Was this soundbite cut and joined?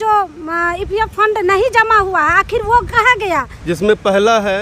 yes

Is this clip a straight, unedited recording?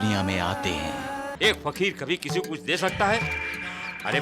no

